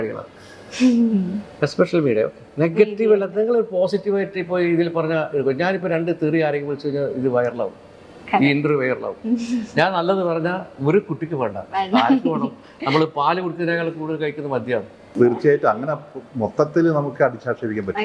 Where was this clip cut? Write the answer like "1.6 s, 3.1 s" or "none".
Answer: 15.0 s